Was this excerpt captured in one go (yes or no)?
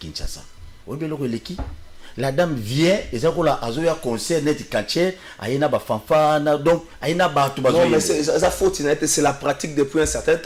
yes